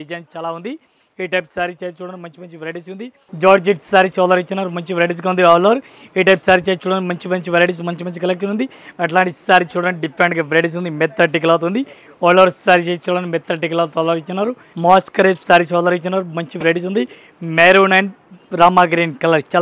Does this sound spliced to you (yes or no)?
yes